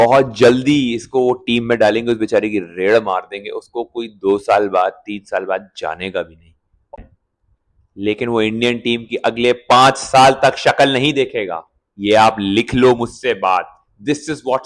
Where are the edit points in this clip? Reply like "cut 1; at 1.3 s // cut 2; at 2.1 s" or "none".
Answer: cut 1; at 6.9 s